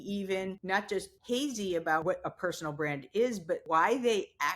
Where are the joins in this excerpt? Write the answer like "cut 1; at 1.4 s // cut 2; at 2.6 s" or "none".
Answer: cut 1; at 0.9 s // cut 2; at 2.0 s // cut 3; at 3.6 s

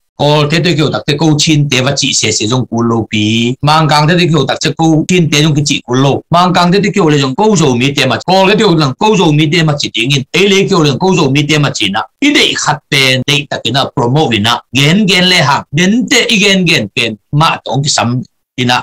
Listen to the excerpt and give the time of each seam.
none

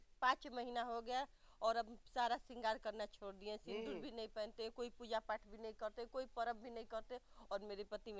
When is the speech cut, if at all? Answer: none

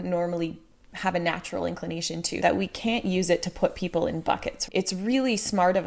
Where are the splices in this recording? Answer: cut 1; at 2.4 s // cut 2; at 4.6 s

